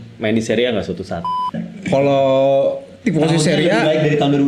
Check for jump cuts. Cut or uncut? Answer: cut